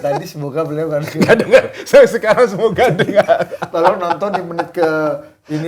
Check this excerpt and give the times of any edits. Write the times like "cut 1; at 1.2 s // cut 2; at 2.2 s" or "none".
none

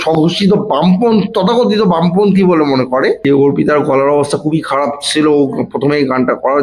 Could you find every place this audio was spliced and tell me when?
cut 1; at 3.2 s

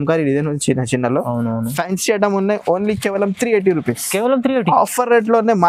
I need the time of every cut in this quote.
none

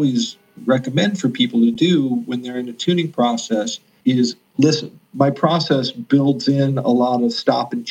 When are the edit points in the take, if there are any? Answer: cut 1; at 3.8 s // cut 2; at 5.0 s

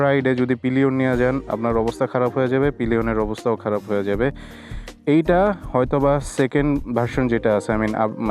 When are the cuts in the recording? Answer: none

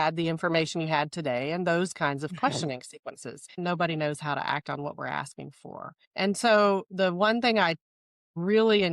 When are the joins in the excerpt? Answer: cut 1; at 3.6 s

